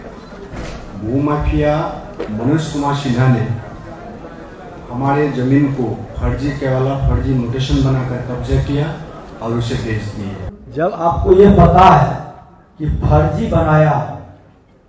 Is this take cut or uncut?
cut